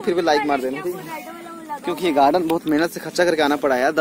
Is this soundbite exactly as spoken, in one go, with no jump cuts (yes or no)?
yes